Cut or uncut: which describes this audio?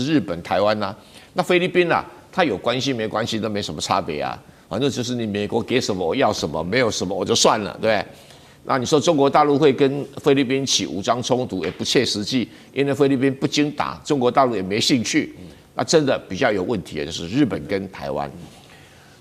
uncut